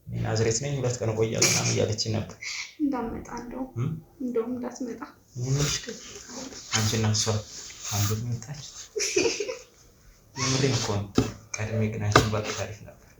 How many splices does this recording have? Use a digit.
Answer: 1